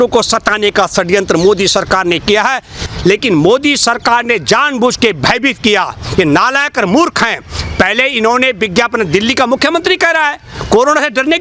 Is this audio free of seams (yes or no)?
no